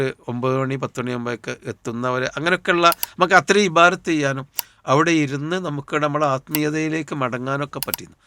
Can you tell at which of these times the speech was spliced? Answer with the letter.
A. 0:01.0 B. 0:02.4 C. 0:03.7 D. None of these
D